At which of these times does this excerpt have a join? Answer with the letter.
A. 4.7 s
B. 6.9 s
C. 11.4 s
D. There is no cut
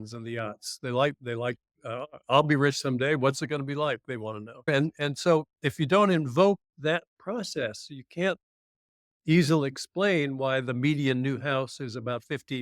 A